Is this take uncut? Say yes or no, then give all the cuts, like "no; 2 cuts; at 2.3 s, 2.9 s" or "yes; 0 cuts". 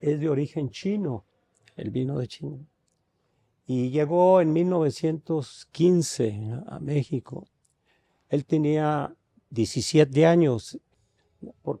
no; 1 cut; at 10.8 s